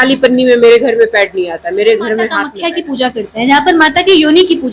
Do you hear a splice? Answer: yes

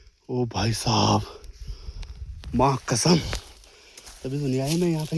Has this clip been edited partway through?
no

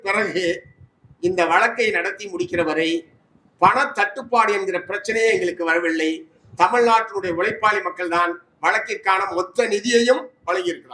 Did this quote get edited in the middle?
no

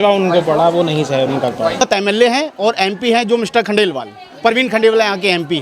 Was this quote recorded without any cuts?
no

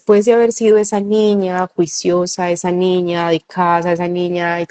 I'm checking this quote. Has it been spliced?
no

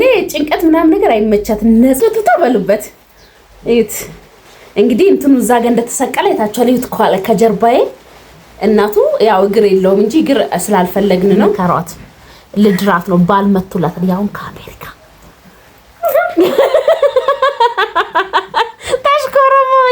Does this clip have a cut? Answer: yes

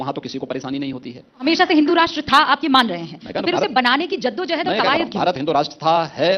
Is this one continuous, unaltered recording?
no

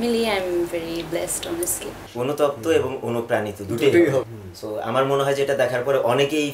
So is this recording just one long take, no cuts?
no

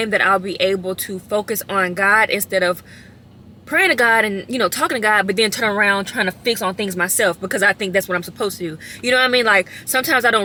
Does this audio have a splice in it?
no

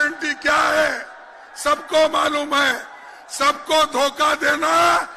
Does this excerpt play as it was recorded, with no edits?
yes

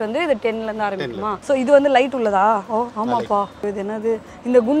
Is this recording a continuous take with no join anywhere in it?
no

